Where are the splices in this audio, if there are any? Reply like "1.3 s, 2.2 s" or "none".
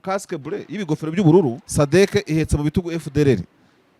1.6 s